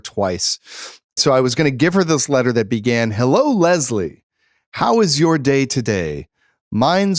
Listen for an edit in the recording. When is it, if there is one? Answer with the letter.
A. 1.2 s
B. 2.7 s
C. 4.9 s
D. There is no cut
A